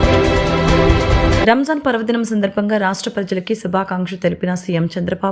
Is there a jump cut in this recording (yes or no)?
yes